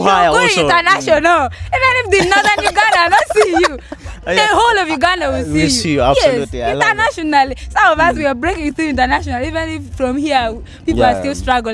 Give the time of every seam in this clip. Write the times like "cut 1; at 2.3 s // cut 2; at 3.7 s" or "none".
none